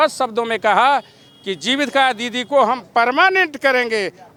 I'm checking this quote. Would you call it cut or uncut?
uncut